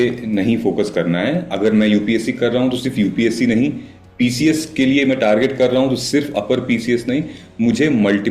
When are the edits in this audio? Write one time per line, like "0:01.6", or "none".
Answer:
none

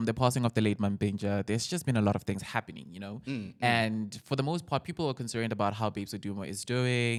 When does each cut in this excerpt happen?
none

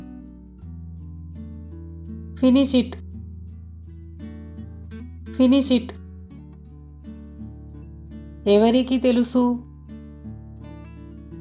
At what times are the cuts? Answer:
0:03.0
0:04.7
0:06.0
0:07.8

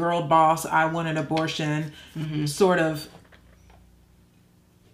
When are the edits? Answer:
none

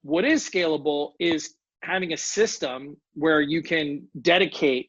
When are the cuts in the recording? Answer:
none

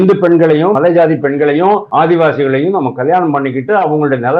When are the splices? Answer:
0:00.8
0:01.9

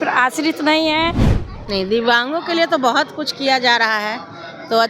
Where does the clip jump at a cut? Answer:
0:01.3

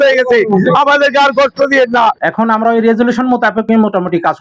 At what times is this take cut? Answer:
0:02.2

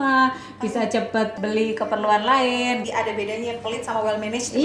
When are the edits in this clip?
0:01.3
0:02.8

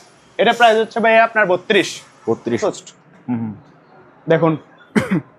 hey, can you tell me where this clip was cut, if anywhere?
0:02.6

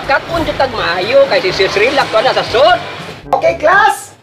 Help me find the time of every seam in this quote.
0:02.9

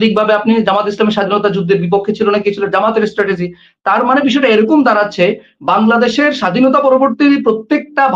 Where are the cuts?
none

